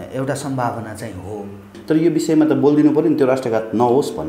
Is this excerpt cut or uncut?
cut